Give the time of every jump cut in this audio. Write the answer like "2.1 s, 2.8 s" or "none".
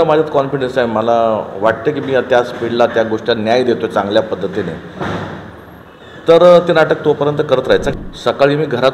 7.9 s

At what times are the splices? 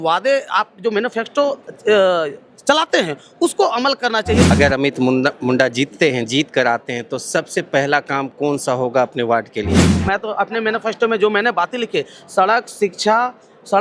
4.5 s, 9.9 s

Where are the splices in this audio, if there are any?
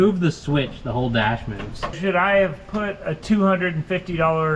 2.0 s, 3.1 s

